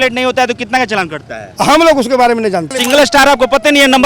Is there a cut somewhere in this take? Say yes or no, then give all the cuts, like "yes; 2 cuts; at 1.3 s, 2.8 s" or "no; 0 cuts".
yes; 1 cut; at 2.7 s